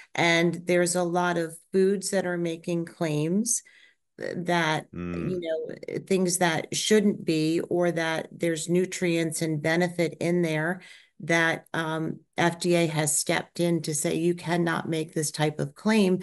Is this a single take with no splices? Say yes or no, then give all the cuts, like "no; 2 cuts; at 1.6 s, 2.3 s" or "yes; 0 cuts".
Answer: yes; 0 cuts